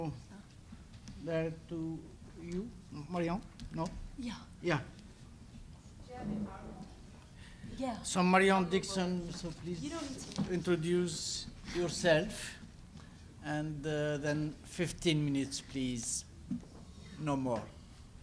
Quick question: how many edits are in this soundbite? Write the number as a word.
one